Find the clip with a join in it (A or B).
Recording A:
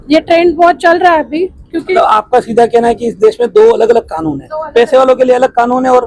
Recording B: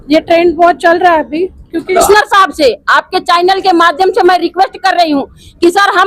B